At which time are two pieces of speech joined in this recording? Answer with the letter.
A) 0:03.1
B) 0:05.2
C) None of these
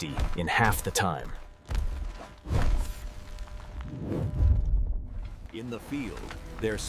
B